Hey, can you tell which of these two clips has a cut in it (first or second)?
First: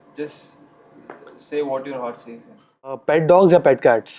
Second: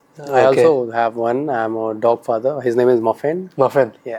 first